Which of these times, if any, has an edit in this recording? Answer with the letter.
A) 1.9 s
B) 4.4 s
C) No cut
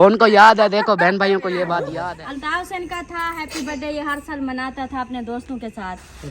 A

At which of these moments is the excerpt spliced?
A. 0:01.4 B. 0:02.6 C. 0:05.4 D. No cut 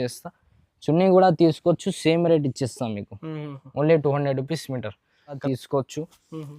C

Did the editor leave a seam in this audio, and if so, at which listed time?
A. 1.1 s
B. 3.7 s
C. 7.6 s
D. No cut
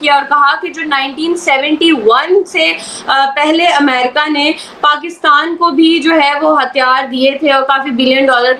D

